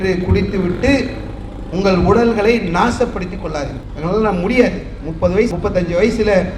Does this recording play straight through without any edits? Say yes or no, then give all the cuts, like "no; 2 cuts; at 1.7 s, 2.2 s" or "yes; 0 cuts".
yes; 0 cuts